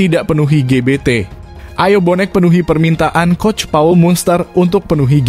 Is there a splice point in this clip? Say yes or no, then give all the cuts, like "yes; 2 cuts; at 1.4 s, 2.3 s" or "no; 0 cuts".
no; 0 cuts